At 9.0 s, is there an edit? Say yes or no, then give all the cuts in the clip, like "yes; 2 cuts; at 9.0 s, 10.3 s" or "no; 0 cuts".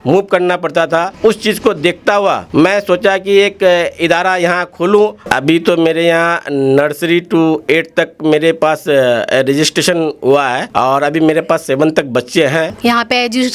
no; 4 cuts; at 2.4 s, 5.2 s, 10.6 s, 12.7 s